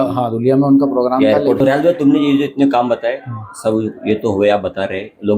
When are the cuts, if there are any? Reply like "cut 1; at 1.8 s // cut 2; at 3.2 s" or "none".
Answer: cut 1; at 1.6 s

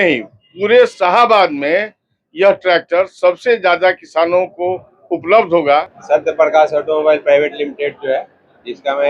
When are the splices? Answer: cut 1; at 6.0 s

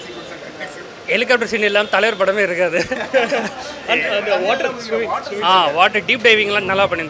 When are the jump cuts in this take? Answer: none

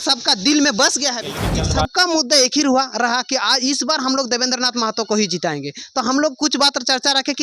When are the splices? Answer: cut 1; at 1.2 s

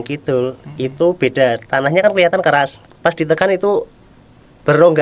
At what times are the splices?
cut 1; at 2.8 s

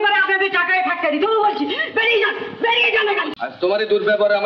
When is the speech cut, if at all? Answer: cut 1; at 3.3 s

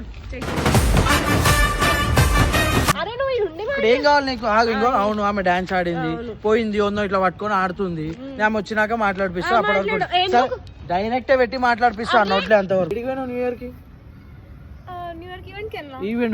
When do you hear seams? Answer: cut 1; at 2.9 s // cut 2; at 12.9 s

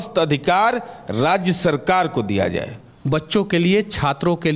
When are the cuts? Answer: cut 1; at 2.9 s

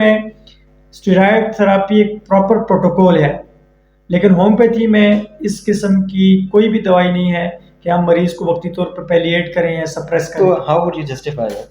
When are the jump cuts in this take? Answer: cut 1; at 10.3 s

